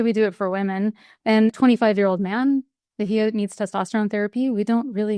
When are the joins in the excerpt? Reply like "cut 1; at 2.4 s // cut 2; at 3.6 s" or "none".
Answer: cut 1; at 1.1 s